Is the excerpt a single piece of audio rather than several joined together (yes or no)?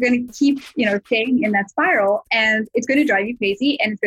no